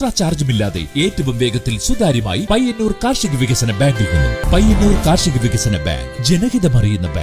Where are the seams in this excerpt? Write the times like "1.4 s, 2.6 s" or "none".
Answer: 4.4 s